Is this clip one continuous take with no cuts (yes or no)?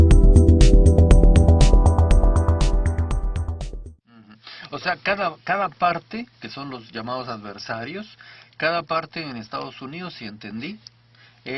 yes